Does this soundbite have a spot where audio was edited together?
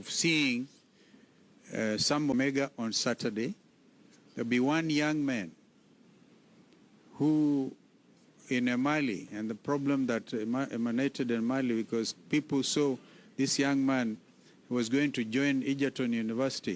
yes; 1 cut; at 2.3 s

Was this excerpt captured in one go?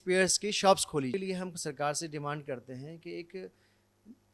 no; 1 cut; at 1.1 s

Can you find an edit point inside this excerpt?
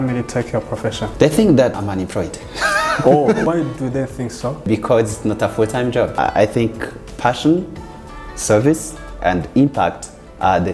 yes; 4 cuts; at 1.1 s, 1.8 s, 4.7 s, 6.1 s

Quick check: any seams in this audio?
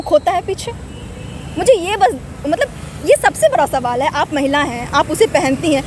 no; 0 cuts

